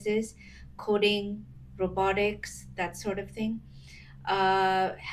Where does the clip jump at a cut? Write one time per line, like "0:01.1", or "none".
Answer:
none